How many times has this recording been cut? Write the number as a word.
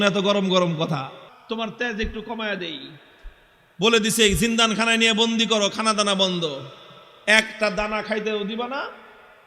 one